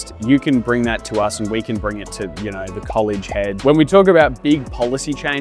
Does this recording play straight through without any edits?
no; 1 cut; at 3.6 s

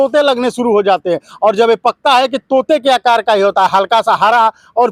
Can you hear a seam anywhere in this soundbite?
no; 0 cuts

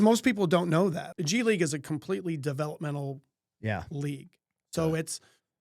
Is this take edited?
yes; 1 cut; at 1.1 s

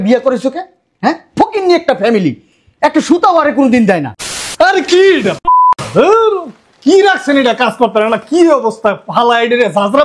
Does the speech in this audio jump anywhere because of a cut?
yes; 1 cut; at 4.2 s

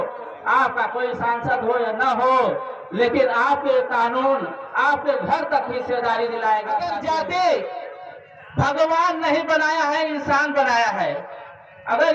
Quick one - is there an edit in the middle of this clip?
yes; 1 cut; at 6.9 s

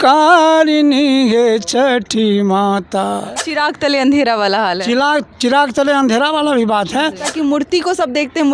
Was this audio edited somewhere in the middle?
yes; 2 cuts; at 3.4 s, 7.3 s

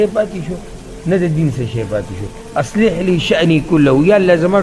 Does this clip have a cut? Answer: no; 0 cuts

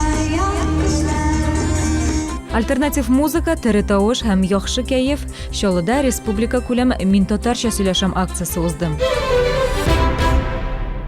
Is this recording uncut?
no; 1 cut; at 8.9 s

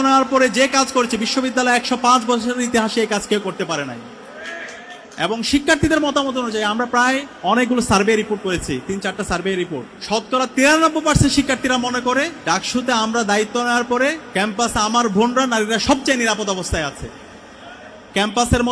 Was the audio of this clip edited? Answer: yes; 4 cuts; at 7.3 s, 9.9 s, 12.4 s, 14.2 s

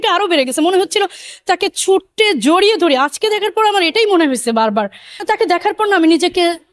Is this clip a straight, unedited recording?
no; 1 cut; at 5.2 s

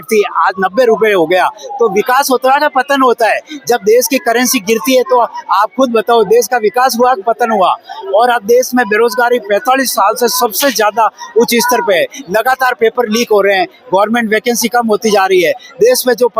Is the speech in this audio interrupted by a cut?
no; 0 cuts

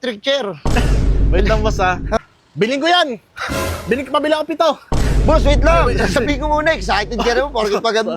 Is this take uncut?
no; 1 cut; at 2.2 s

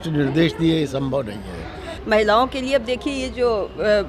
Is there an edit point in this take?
yes; 1 cut; at 1.9 s

